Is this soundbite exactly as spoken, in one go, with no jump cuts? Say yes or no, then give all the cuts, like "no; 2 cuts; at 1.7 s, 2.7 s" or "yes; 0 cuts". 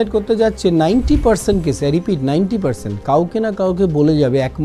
yes; 0 cuts